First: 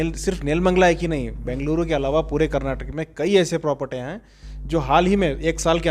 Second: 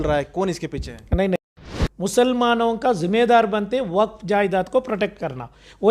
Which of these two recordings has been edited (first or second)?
second